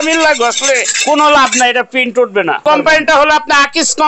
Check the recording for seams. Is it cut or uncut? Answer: cut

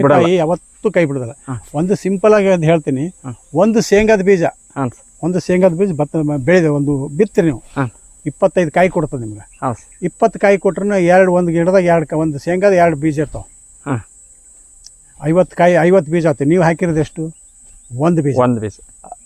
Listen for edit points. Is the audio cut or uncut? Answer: uncut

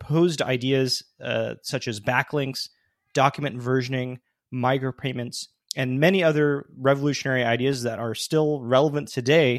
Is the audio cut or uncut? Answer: uncut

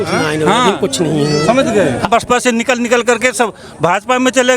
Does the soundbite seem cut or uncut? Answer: cut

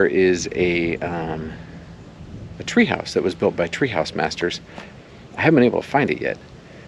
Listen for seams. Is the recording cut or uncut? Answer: uncut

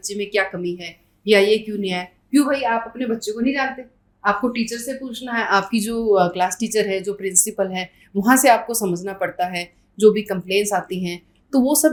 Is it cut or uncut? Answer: uncut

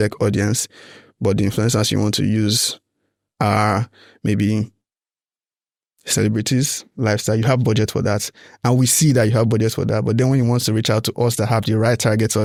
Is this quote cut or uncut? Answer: uncut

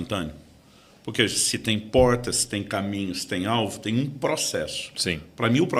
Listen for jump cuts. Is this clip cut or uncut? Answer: uncut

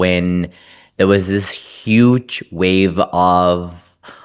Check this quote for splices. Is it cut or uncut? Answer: uncut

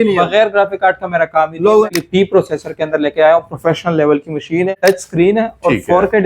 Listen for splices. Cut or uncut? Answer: cut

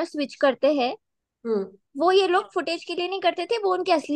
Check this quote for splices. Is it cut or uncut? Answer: uncut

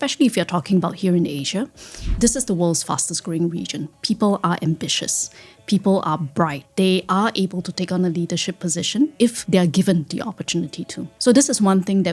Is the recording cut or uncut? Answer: uncut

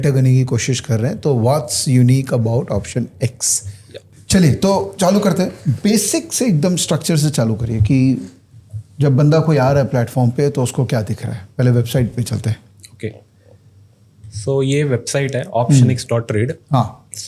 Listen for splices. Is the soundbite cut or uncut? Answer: uncut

